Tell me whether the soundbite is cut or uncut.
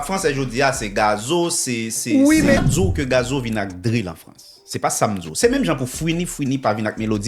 cut